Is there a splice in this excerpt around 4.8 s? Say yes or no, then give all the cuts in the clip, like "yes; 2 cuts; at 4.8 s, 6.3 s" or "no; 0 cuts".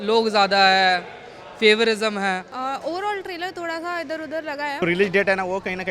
yes; 2 cuts; at 2.5 s, 4.8 s